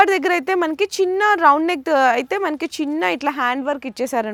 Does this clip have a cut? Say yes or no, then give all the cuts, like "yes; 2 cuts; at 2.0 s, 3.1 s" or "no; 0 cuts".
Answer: no; 0 cuts